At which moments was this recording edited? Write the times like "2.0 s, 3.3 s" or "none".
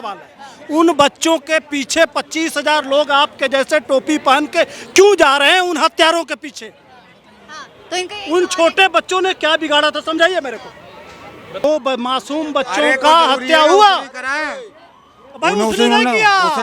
11.6 s